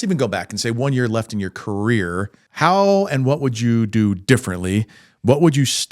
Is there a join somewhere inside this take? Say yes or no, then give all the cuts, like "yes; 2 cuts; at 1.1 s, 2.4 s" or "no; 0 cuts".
yes; 1 cut; at 2.4 s